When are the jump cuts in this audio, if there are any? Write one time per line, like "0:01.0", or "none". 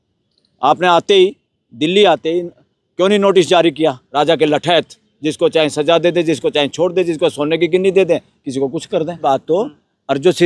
0:04.0
0:09.2